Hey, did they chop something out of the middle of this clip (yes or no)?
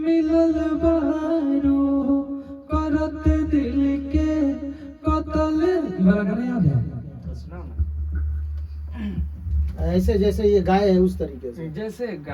no